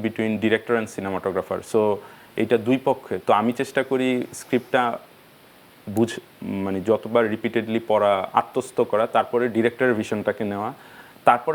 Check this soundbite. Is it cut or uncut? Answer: uncut